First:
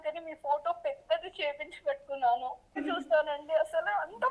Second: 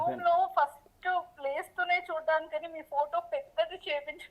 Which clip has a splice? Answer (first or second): first